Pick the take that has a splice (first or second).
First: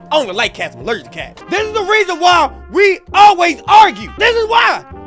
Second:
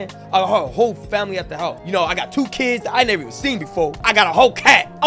first